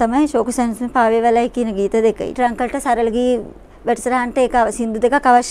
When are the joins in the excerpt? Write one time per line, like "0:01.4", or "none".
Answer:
0:02.3